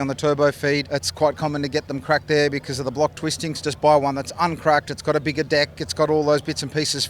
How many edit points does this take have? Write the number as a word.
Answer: two